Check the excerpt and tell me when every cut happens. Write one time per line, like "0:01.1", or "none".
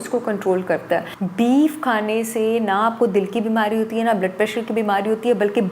0:01.2